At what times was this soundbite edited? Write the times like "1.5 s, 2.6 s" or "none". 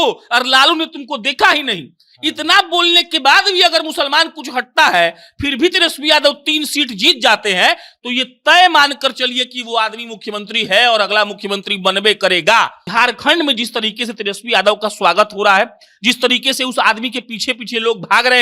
12.8 s